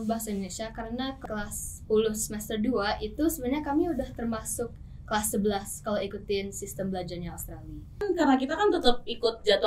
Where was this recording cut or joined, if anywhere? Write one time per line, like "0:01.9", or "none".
0:01.2
0:08.0